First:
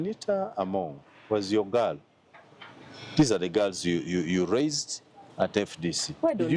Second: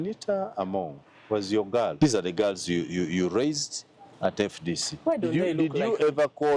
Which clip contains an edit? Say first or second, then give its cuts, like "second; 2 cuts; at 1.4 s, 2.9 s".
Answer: second; 1 cut; at 1.9 s